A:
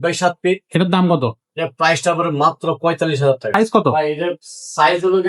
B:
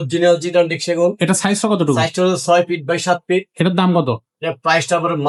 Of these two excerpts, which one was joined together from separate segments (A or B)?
A